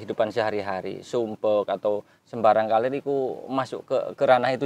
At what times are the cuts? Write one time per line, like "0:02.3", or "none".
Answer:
none